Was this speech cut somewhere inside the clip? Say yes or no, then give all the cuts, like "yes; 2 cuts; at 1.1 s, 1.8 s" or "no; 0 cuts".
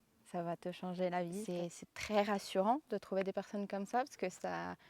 yes; 1 cut; at 1.4 s